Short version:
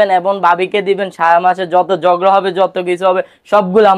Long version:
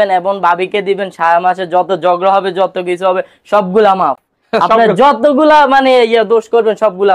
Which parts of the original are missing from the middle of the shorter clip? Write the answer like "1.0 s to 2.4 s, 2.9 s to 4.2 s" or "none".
none